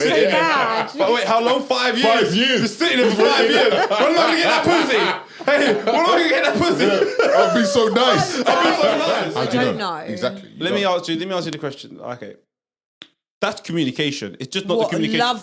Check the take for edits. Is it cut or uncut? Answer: cut